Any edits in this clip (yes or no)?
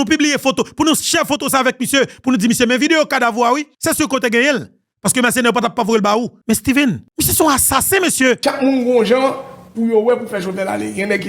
yes